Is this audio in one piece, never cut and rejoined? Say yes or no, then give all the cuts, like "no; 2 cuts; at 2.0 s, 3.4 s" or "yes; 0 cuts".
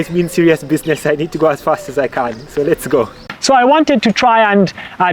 no; 1 cut; at 3.2 s